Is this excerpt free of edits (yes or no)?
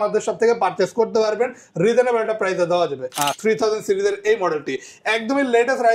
no